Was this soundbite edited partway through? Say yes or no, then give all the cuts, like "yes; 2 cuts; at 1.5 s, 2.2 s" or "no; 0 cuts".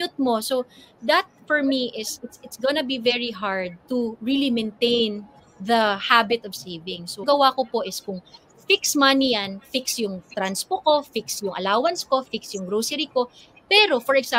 yes; 1 cut; at 7.2 s